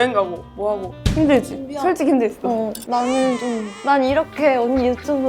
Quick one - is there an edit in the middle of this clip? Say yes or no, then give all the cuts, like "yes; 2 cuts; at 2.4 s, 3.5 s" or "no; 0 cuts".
yes; 3 cuts; at 0.9 s, 2.8 s, 3.7 s